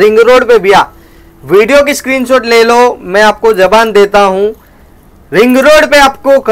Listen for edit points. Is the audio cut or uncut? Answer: uncut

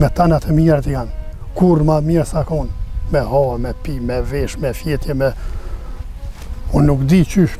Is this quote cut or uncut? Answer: uncut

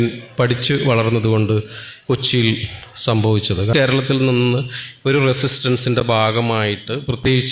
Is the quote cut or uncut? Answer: cut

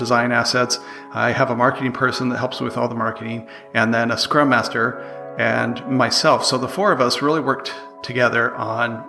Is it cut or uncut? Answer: uncut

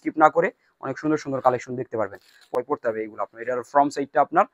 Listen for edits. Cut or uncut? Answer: cut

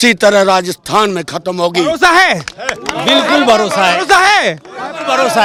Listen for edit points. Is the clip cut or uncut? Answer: uncut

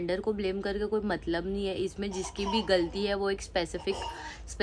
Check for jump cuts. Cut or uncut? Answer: uncut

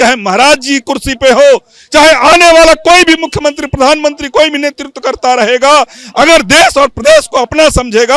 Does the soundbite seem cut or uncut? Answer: uncut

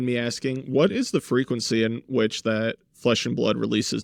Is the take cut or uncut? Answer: uncut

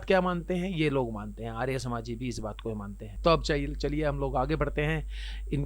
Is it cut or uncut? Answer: uncut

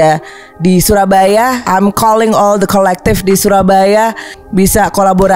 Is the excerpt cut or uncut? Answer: cut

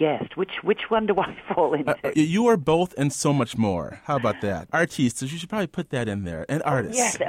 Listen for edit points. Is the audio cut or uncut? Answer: cut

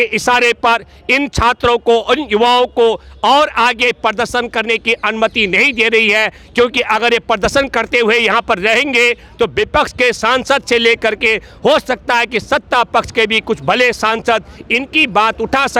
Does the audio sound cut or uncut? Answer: uncut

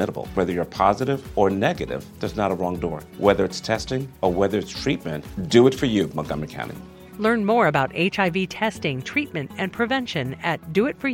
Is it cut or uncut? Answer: uncut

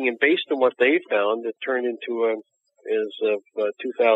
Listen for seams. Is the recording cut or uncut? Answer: cut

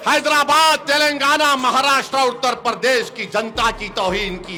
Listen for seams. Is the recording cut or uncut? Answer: uncut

